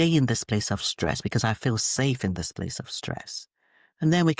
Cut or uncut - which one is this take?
uncut